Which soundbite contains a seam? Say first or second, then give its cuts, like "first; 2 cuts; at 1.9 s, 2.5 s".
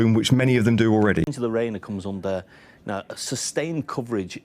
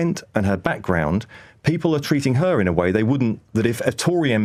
first; 1 cut; at 1.2 s